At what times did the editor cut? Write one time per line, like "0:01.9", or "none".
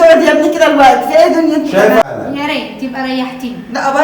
0:02.0